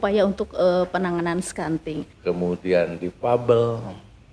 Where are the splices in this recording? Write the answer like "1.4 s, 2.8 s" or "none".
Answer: 2.1 s

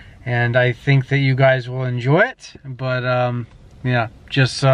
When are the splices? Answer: none

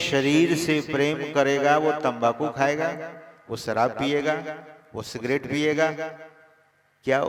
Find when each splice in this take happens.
none

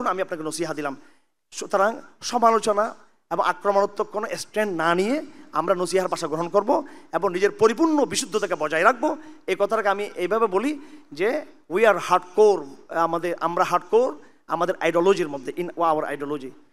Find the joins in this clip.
none

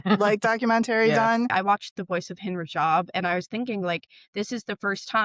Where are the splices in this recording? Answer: 1.5 s

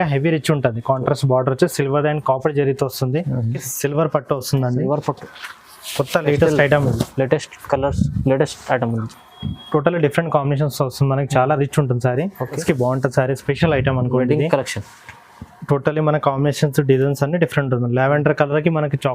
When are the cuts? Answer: 3.7 s, 12.6 s

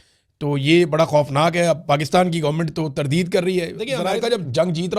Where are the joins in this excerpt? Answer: 4.0 s

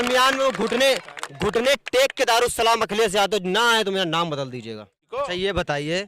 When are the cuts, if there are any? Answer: 5.0 s

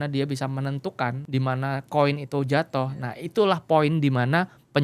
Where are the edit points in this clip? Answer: 1.2 s

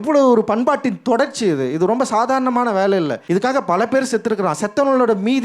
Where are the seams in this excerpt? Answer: 3.2 s

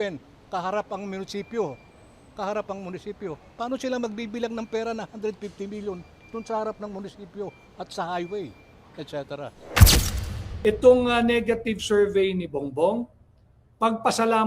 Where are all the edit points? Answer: 10.1 s

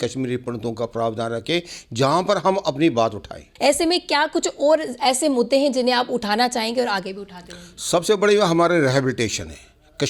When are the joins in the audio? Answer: 3.4 s

